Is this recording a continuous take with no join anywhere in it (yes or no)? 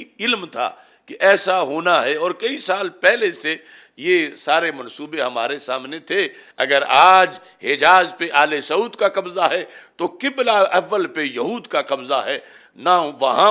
no